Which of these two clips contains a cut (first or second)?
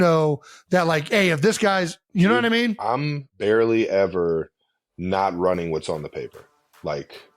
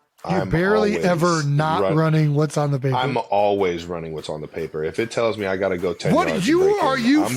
first